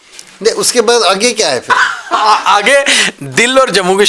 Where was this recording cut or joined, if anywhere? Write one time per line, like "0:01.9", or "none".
none

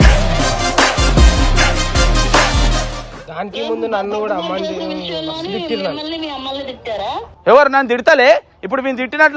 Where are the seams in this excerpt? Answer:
none

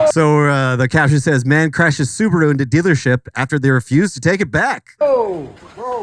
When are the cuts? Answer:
0:05.0

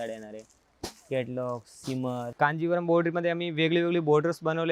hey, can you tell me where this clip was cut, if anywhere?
0:02.3

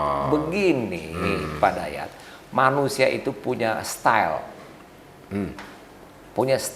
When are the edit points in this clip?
none

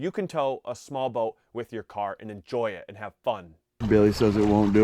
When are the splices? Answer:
0:03.7

